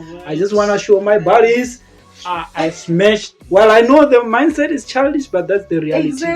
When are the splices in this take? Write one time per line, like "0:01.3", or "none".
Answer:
0:03.3

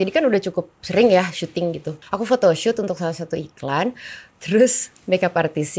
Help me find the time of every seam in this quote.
0:02.0

